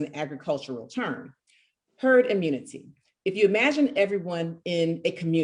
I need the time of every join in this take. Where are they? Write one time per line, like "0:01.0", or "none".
none